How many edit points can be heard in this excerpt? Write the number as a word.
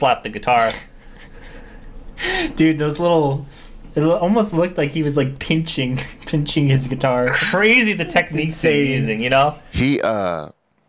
one